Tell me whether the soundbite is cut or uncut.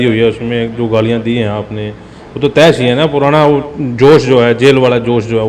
uncut